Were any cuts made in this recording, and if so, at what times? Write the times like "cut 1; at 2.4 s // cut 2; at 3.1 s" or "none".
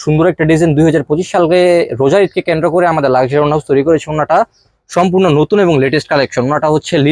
none